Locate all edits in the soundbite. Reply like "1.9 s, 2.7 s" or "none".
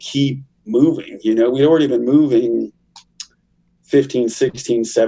none